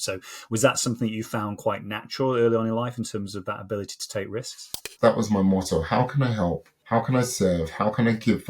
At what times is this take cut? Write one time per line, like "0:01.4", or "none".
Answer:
0:04.9
0:06.7